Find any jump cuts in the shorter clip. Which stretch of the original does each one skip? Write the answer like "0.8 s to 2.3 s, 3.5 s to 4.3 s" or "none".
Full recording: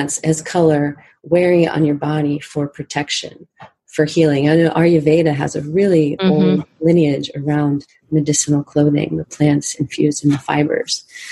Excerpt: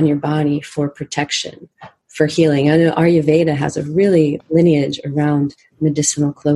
6.2 s to 6.7 s